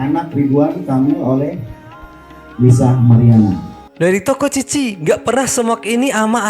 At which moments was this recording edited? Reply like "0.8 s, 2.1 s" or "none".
3.8 s